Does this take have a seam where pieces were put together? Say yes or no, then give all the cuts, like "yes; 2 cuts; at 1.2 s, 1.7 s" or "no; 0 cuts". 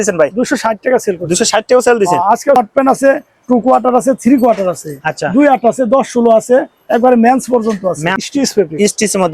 yes; 2 cuts; at 2.6 s, 8.2 s